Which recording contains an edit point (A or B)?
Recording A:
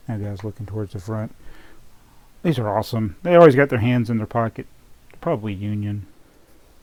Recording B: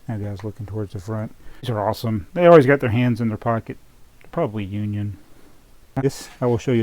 B